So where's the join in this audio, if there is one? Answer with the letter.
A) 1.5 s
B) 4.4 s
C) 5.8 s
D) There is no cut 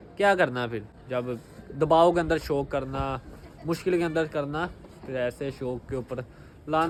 D